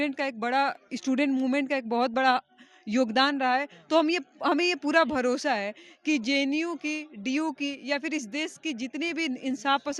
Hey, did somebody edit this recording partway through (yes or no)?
no